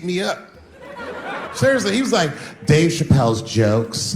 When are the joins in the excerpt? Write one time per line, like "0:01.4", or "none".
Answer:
0:01.5